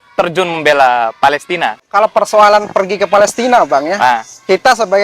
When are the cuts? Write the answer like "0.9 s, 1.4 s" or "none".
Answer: 1.9 s